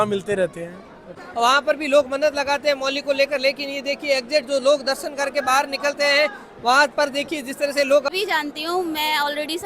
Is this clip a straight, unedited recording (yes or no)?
no